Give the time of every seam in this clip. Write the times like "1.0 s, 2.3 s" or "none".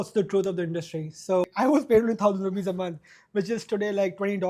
1.5 s